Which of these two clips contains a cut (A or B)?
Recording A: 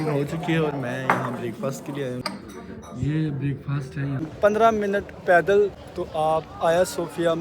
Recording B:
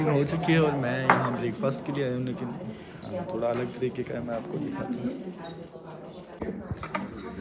A